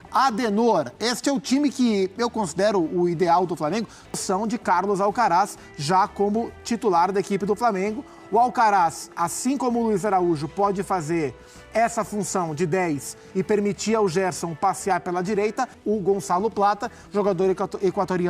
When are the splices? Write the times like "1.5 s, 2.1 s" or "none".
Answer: 4.2 s, 15.8 s